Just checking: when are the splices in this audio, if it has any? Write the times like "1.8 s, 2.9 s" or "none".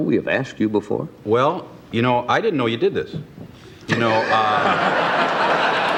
none